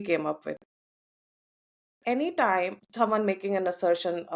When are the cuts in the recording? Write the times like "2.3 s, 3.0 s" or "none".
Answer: 2.8 s